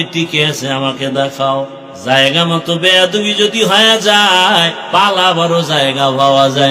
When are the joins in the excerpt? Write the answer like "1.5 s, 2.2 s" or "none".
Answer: 1.9 s, 4.8 s